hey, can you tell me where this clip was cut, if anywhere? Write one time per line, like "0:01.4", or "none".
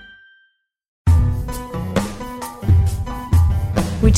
0:01.0